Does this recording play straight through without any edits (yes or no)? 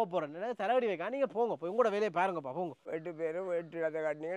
no